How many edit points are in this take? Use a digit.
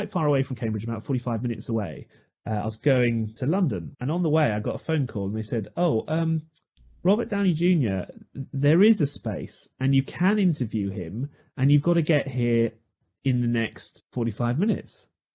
0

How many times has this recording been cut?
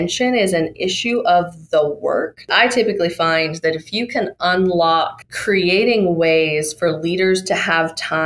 2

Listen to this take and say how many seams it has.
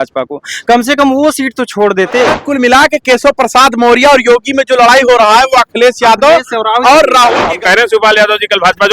2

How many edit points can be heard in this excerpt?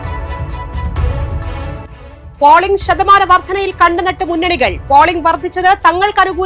0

